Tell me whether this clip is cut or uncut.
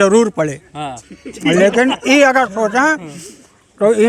uncut